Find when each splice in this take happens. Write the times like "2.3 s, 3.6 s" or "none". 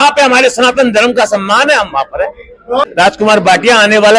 3.1 s